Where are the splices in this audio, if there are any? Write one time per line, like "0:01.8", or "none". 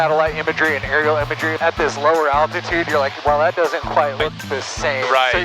0:01.5
0:04.2